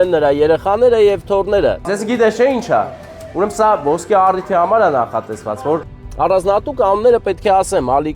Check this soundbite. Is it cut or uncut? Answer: cut